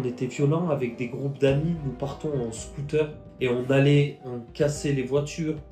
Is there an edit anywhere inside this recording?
no; 0 cuts

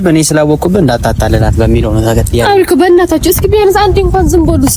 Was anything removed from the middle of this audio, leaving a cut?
no; 0 cuts

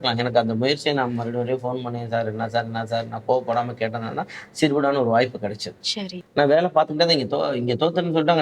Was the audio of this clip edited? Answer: yes; 1 cut; at 6.2 s

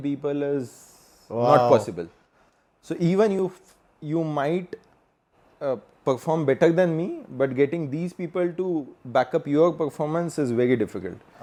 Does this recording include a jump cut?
no; 0 cuts

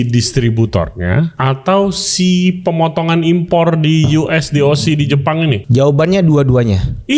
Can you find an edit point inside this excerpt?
yes; 2 cuts; at 1.3 s, 5.6 s

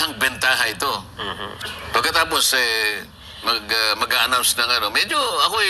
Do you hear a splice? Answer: no; 0 cuts

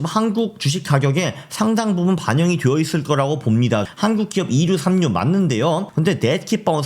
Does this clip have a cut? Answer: yes; 2 cuts; at 3.9 s, 5.9 s

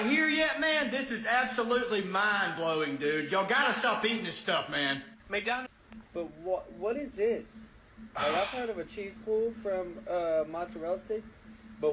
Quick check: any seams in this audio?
yes; 1 cut; at 5.7 s

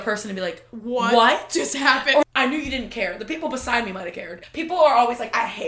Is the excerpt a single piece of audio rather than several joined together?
no; 1 cut; at 2.2 s

